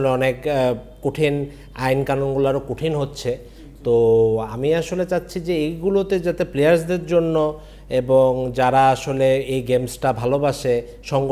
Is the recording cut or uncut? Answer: uncut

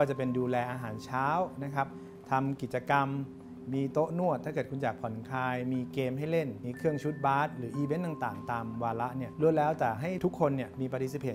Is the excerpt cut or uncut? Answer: cut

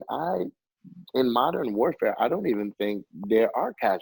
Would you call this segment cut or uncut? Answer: uncut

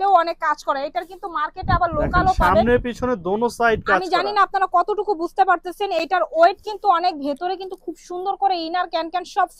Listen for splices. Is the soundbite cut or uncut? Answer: uncut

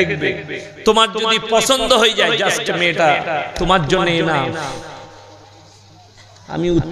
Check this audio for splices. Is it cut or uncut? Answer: uncut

